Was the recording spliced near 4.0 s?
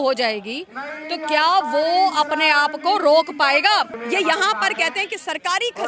yes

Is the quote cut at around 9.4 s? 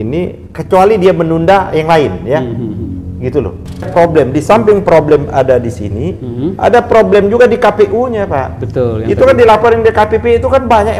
no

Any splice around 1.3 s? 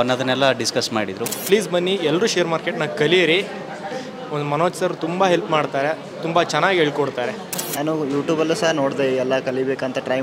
yes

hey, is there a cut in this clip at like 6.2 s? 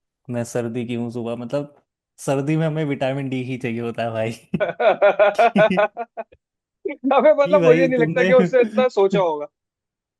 no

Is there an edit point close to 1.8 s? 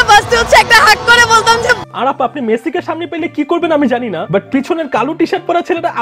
no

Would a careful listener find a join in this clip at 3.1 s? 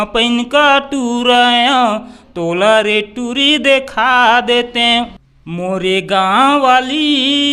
no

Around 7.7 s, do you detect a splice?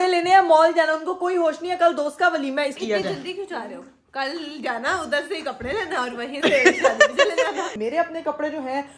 yes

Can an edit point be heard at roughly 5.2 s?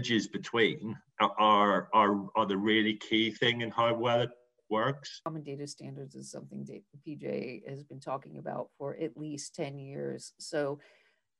yes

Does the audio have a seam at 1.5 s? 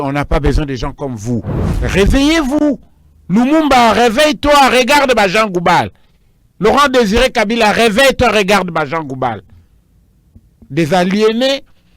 yes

